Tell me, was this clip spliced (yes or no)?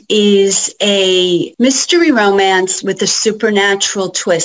yes